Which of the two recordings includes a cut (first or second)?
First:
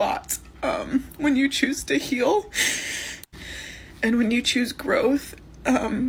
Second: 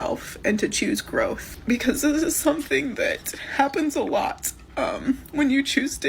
second